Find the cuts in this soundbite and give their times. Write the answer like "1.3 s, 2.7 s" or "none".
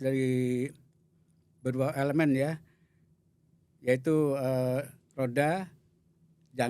none

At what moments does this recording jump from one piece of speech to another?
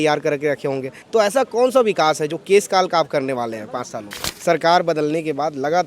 0.9 s, 4.2 s

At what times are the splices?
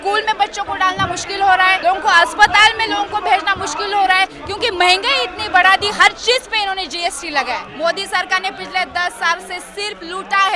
1.8 s, 7.7 s

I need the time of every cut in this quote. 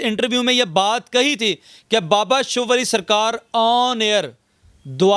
none

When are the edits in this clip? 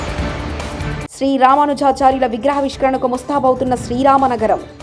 1.0 s

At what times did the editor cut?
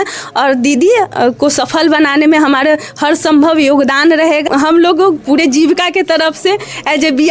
4.5 s

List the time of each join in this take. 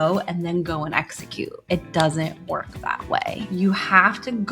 1.6 s, 2.4 s, 3.4 s

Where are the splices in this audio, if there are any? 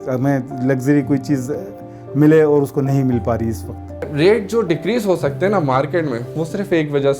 none

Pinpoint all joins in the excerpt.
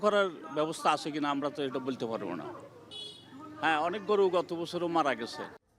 none

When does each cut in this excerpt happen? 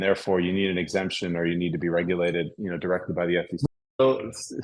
3.7 s

